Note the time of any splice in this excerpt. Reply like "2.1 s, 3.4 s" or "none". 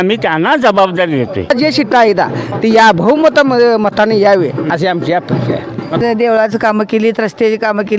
1.5 s, 6.0 s